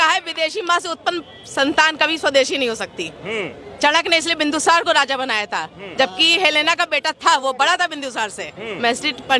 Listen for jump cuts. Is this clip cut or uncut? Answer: uncut